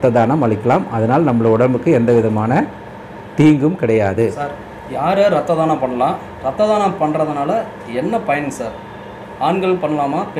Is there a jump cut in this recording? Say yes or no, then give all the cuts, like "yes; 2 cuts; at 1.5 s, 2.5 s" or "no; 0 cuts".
no; 0 cuts